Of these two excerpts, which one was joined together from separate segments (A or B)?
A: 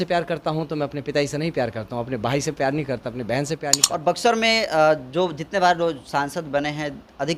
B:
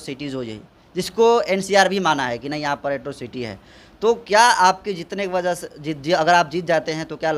A